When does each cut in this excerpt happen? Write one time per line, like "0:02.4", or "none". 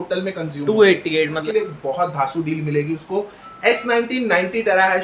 0:01.4